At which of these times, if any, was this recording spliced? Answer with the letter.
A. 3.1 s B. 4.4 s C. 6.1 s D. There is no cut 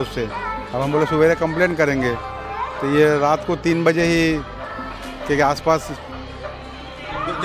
D